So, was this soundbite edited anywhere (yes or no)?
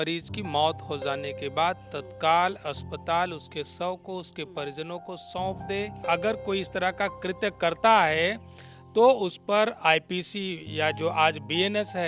yes